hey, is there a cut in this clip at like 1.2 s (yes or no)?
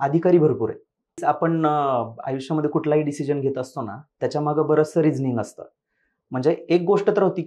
yes